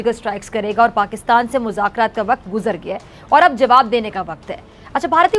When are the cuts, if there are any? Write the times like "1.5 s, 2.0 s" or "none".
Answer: none

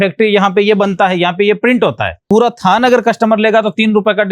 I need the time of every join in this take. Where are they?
2.2 s

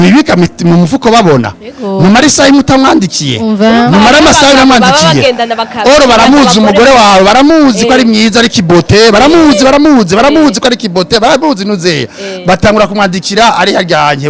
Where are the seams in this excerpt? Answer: none

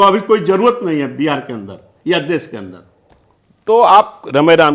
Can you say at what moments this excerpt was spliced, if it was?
none

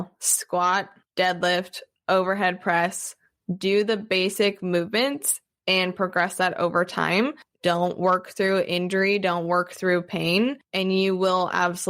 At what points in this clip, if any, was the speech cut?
1.0 s, 7.5 s, 10.7 s

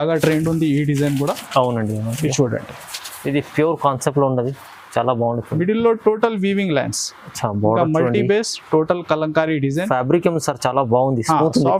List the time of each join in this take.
none

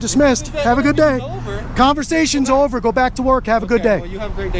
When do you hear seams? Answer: none

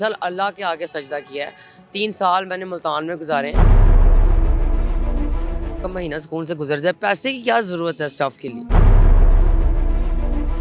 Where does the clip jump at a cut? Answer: 5.8 s

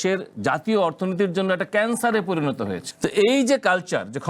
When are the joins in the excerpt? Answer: 2.8 s

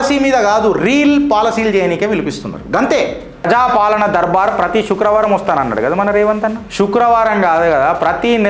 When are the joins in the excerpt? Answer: 3.5 s, 6.6 s

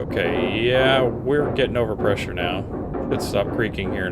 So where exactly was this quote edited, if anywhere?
2.9 s

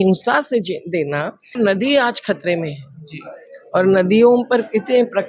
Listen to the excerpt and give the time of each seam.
1.5 s

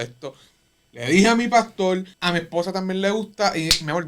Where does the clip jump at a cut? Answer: 2.1 s

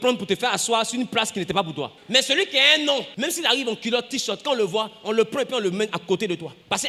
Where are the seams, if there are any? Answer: none

